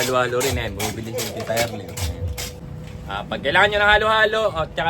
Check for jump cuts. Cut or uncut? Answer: cut